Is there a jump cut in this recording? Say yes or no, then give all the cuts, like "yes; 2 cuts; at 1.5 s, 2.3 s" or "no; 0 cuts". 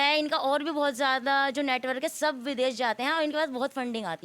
no; 0 cuts